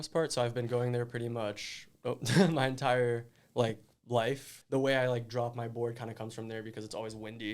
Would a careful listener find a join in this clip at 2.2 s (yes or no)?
no